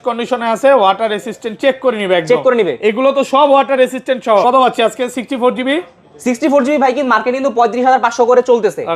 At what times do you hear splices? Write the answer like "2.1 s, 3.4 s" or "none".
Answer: 4.4 s